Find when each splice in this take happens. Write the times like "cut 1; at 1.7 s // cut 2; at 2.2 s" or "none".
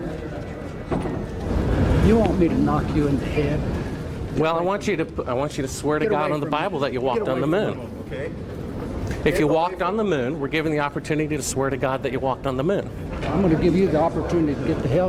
cut 1; at 1.4 s